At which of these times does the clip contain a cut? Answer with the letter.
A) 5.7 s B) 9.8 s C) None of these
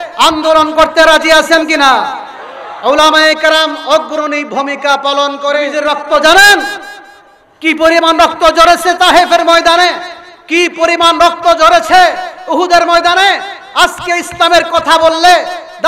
A